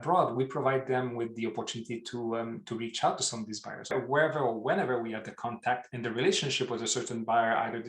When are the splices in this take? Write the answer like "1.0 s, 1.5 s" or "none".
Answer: 3.9 s, 5.9 s